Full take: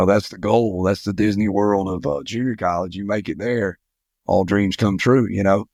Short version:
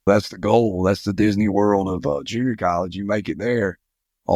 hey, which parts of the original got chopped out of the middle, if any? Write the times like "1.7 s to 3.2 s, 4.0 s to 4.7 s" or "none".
none